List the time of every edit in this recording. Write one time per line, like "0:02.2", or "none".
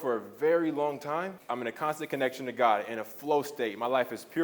0:01.4